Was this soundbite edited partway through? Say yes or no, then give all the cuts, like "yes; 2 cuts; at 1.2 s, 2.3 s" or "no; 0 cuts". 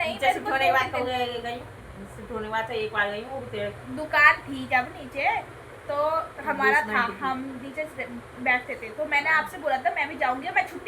no; 0 cuts